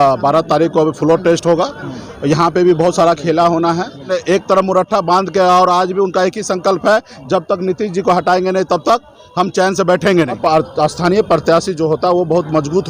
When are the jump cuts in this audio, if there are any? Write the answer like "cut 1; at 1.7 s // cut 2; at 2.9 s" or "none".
cut 1; at 4.1 s // cut 2; at 10.4 s